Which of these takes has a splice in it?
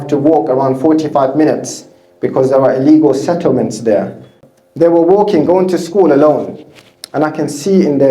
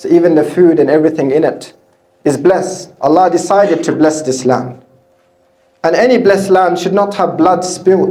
first; 1 cut; at 4.4 s

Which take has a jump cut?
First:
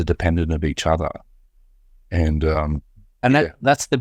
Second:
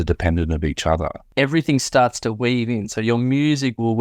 second; 1 cut; at 1.2 s

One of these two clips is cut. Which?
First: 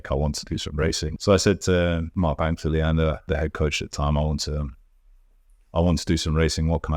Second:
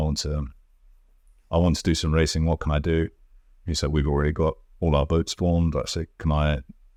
first; 3 cuts; at 1.1 s, 2.1 s, 3.3 s

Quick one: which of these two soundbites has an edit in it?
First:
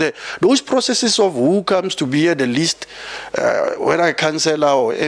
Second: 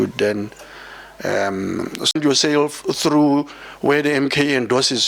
second; 1 cut; at 2.1 s

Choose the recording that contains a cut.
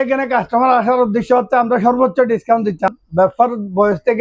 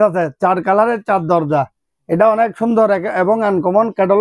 first; 1 cut; at 2.9 s

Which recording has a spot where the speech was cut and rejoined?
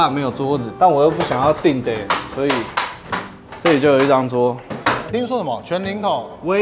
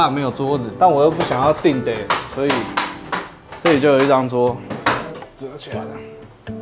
first; 1 cut; at 5.0 s

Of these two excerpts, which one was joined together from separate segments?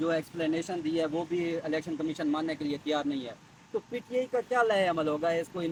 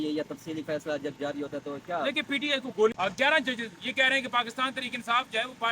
second; 1 cut; at 2.9 s

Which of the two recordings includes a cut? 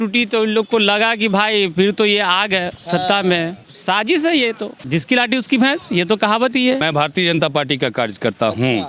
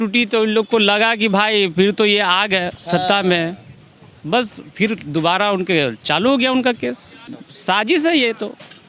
first; 3 cuts; at 3.7 s, 4.7 s, 6.8 s

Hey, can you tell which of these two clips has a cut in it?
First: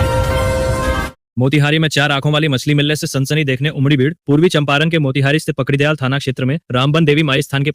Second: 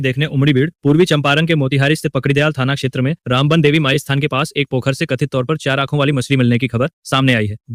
first; 1 cut; at 1.2 s

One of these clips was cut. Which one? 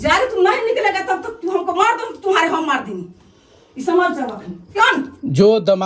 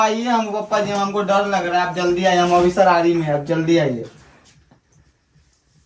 first; 1 cut; at 4.7 s

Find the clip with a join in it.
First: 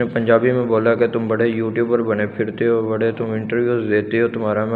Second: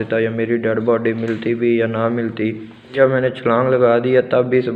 second; 1 cut; at 2.9 s

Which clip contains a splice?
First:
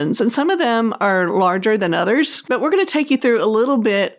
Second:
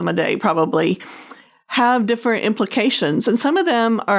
first; 1 cut; at 2.4 s

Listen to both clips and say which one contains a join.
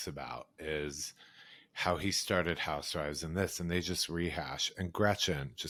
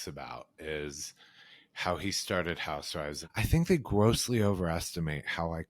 second; 1 cut; at 3.2 s

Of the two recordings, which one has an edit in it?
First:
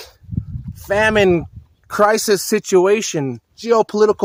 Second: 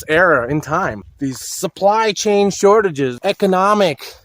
second; 2 cuts; at 1.1 s, 3.2 s

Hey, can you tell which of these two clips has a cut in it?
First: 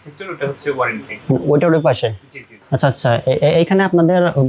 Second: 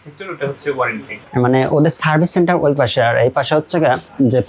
second; 1 cut; at 1.2 s

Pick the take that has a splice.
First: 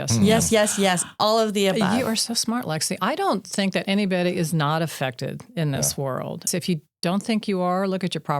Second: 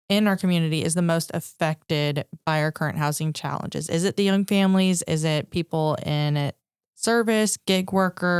first; 1 cut; at 6.5 s

